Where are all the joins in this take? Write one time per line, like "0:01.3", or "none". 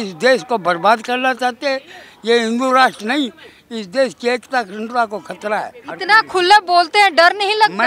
0:05.9